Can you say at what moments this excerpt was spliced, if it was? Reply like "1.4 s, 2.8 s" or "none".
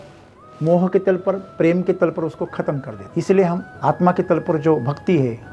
2.9 s, 3.7 s